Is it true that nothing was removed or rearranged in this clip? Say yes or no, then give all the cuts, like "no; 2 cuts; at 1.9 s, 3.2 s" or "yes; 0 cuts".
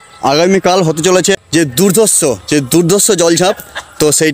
no; 1 cut; at 1.4 s